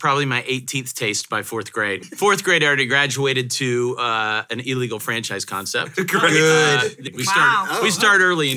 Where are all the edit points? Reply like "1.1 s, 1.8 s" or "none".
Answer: 2.0 s, 7.0 s